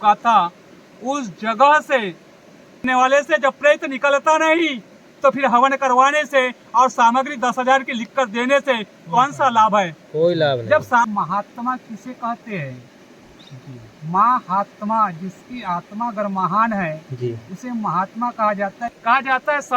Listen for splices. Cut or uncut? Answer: cut